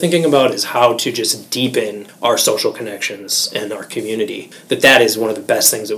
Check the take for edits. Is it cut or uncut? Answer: cut